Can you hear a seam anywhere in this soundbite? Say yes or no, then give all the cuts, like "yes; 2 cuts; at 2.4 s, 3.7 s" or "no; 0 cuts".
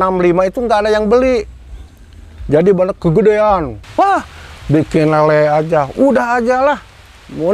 yes; 1 cut; at 3.8 s